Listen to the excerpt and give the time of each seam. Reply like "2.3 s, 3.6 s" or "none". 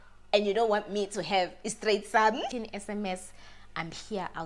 2.5 s